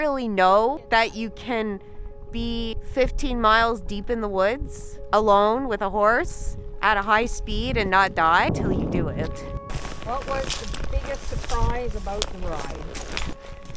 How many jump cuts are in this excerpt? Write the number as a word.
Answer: four